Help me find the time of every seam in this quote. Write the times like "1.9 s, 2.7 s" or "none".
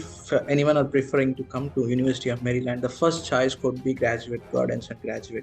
none